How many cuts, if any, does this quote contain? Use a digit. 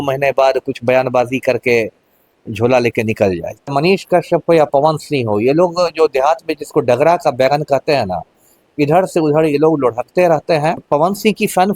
2